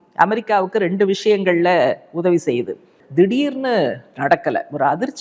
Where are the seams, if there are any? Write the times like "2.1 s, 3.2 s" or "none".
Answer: 3.0 s